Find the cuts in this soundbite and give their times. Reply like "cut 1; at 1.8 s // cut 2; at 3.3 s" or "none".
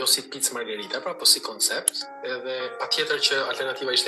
none